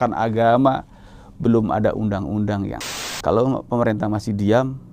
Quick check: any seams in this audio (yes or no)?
yes